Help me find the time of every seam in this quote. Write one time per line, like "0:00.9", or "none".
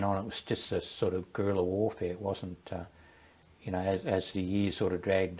none